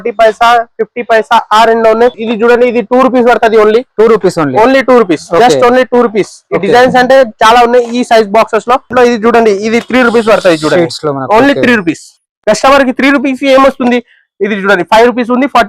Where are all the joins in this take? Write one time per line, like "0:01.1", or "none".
0:02.3
0:08.9